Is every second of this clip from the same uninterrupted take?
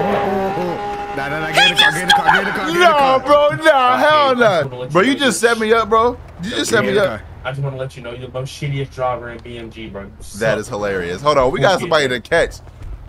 yes; 0 cuts

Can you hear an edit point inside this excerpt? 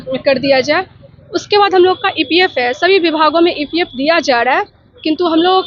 no; 0 cuts

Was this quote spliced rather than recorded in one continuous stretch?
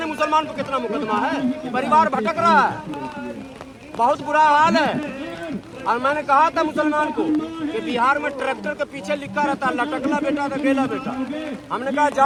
no; 0 cuts

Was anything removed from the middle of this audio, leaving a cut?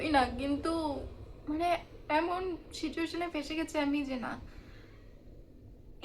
no; 0 cuts

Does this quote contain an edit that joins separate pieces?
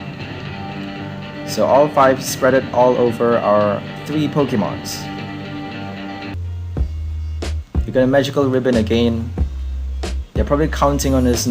yes; 1 cut; at 6.3 s

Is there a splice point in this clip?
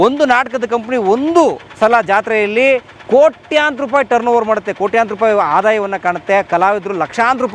no; 0 cuts

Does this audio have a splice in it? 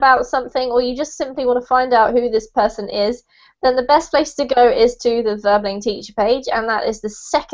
yes; 1 cut; at 6.6 s

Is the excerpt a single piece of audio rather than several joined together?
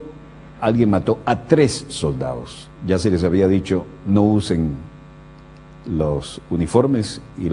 no; 1 cut; at 3.7 s

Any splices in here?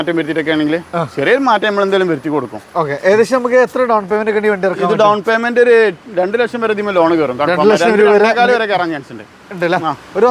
no; 0 cuts

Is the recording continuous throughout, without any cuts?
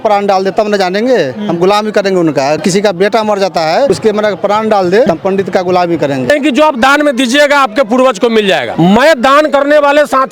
no; 5 cuts; at 2.6 s, 3.9 s, 5.1 s, 6.3 s, 8.7 s

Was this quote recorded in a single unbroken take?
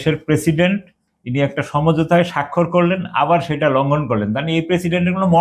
yes; 0 cuts

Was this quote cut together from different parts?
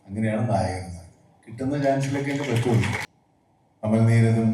yes; 1 cut; at 3.1 s

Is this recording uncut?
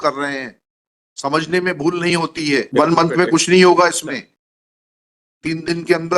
no; 1 cut; at 2.7 s

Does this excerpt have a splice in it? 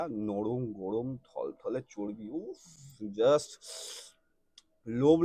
no; 0 cuts

